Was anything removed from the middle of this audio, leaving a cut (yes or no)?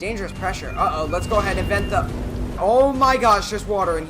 yes